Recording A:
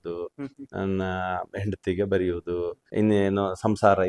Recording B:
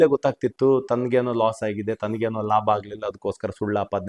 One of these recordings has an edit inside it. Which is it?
A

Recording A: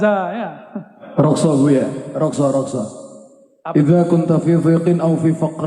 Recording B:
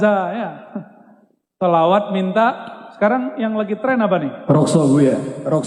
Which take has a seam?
A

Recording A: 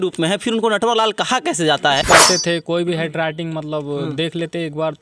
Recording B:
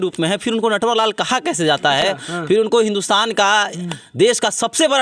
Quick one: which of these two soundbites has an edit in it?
A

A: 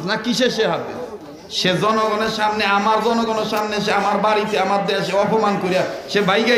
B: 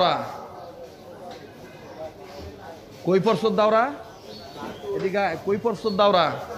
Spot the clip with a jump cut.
B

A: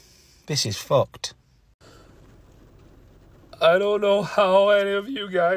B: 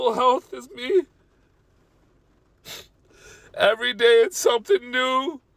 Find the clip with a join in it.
A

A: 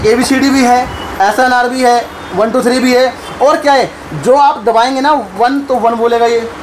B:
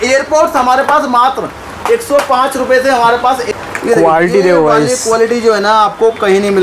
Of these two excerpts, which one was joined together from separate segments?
B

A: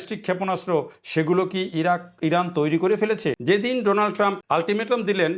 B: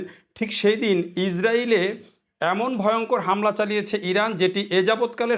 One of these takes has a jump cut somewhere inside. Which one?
A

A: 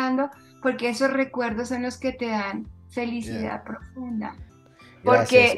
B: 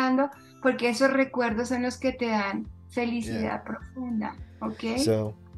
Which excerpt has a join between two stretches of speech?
A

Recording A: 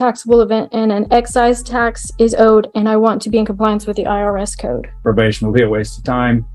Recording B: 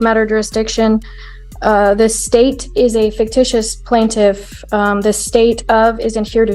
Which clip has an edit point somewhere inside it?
A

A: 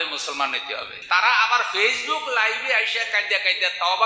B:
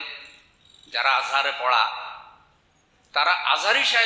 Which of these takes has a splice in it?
A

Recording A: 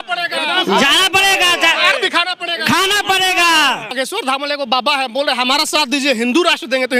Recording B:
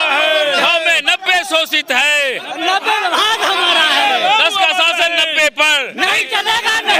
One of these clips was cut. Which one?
A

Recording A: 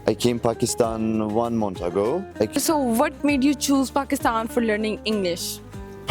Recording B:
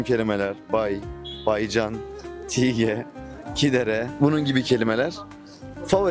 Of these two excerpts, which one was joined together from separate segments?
A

